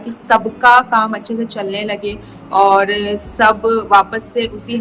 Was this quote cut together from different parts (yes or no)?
no